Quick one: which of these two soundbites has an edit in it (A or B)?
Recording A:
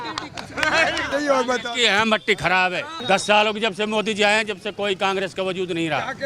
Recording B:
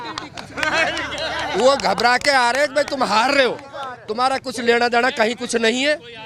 A